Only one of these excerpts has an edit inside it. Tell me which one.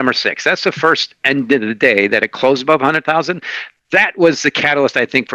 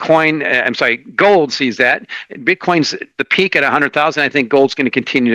second; 1 cut; at 3.1 s

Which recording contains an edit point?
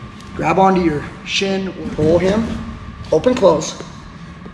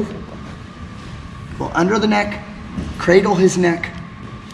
first; 1 cut; at 1.8 s

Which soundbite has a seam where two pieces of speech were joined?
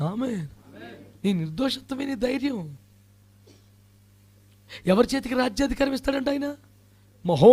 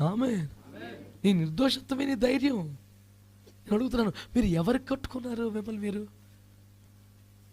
second; 1 cut; at 3.5 s

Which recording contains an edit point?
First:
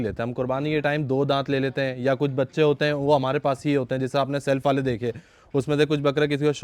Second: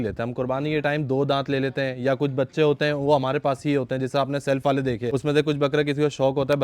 second; 1 cut; at 5.1 s

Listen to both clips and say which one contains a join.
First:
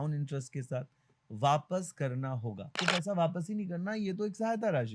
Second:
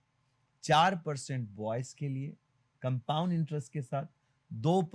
first; 1 cut; at 2.8 s

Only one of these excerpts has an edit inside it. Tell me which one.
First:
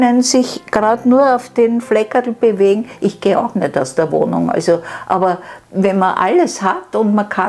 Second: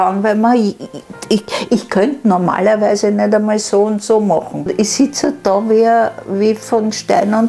second; 1 cut; at 4.7 s

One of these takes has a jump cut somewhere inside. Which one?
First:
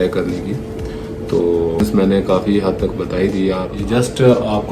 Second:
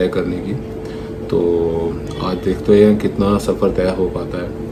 first; 2 cuts; at 1.8 s, 3.7 s

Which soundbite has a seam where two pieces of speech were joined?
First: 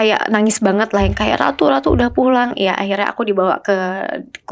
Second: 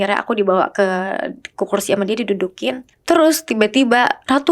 second; 1 cut; at 2.9 s

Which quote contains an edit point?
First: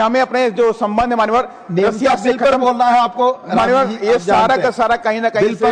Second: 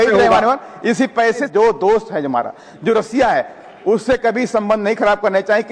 second; 1 cut; at 1.5 s

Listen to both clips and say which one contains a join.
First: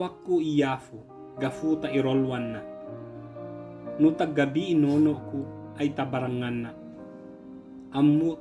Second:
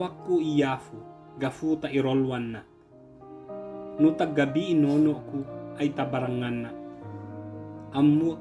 first; 2 cuts; at 2.6 s, 4.0 s

